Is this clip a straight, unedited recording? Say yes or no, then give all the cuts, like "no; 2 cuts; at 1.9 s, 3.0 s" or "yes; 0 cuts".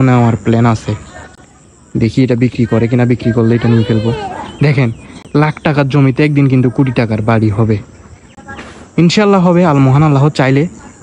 yes; 0 cuts